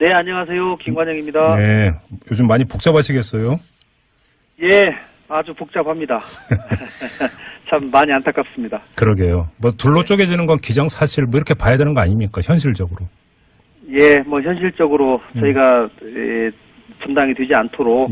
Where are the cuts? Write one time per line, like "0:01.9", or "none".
0:07.7